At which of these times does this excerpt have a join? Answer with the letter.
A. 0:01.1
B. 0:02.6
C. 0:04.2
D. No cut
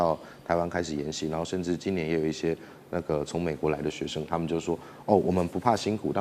D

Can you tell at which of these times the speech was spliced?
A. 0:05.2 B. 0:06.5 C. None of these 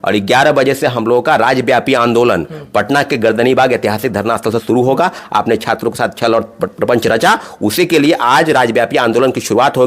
A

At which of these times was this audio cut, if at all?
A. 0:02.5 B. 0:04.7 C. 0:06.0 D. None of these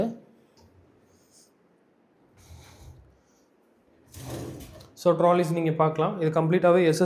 D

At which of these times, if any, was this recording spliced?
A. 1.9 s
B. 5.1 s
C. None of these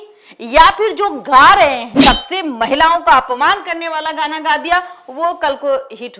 A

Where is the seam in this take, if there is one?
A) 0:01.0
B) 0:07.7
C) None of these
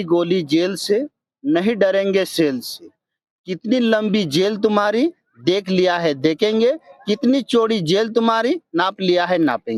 C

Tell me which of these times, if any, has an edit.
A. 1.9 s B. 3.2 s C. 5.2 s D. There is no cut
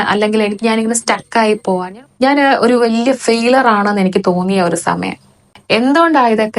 A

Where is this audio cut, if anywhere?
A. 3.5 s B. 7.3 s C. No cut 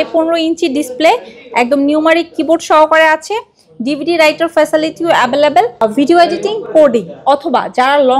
C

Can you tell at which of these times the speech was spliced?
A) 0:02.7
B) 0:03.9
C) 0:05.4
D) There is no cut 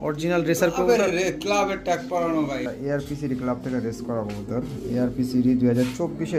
A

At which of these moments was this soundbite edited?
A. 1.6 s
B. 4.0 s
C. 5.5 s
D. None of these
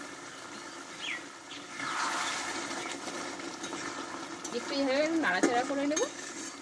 A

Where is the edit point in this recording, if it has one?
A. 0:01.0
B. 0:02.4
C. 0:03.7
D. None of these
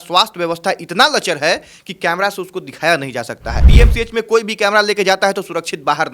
C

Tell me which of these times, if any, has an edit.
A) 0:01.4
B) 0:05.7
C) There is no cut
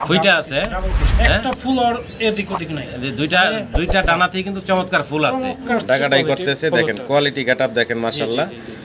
B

